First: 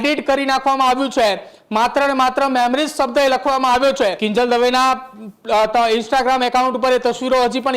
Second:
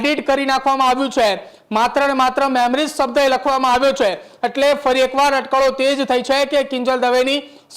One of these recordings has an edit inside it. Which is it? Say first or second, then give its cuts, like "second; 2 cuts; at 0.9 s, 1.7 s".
first; 1 cut; at 4.2 s